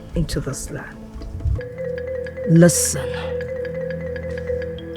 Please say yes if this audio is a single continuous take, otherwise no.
no